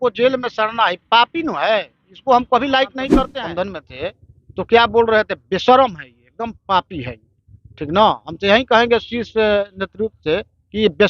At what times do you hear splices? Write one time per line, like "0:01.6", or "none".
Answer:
0:03.3

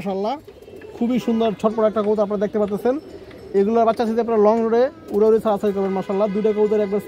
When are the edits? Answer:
none

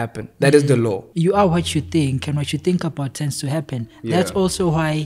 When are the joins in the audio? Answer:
0:01.1

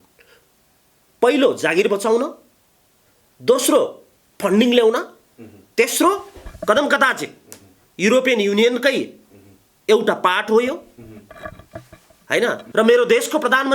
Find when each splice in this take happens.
0:12.6

